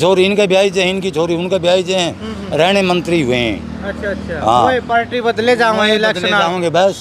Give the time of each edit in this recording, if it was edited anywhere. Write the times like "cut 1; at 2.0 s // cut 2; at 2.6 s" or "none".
none